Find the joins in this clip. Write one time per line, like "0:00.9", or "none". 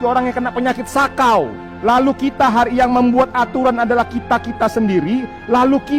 0:01.7

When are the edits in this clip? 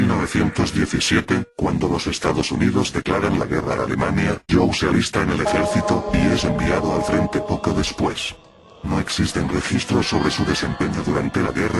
none

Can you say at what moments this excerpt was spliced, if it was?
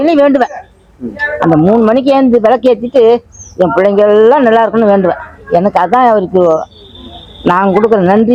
none

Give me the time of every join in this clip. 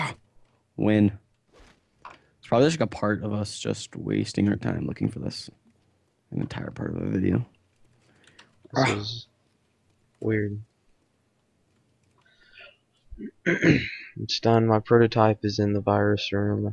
none

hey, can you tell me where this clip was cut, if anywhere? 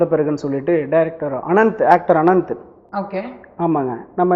none

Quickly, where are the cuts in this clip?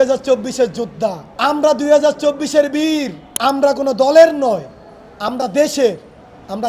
0:01.3
0:03.2

